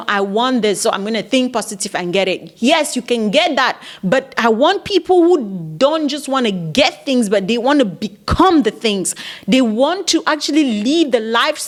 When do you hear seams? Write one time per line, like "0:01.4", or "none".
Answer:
none